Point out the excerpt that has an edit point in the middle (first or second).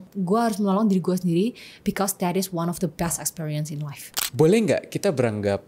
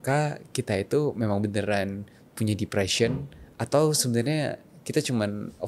first